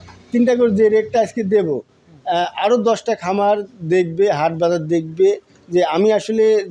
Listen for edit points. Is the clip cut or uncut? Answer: uncut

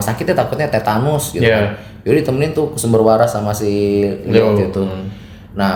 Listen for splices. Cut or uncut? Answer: uncut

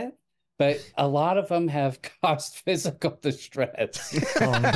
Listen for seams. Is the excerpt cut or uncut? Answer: uncut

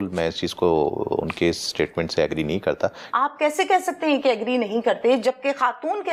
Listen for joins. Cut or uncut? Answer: cut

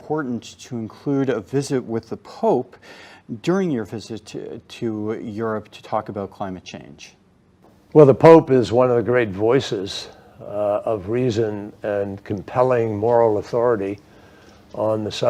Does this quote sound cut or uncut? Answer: uncut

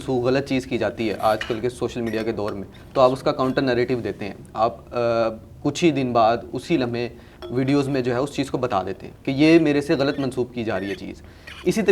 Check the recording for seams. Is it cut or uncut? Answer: uncut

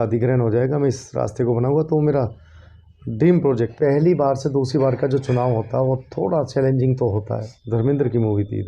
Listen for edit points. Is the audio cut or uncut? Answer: cut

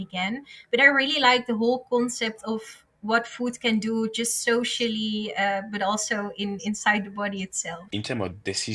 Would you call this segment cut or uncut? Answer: cut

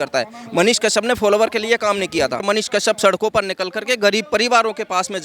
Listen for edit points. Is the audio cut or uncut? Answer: cut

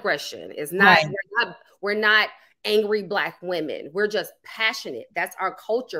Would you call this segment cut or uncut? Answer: uncut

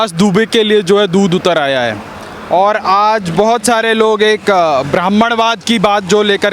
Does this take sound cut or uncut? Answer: uncut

